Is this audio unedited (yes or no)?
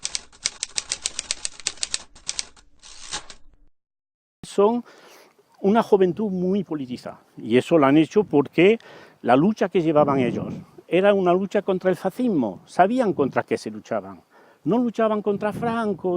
no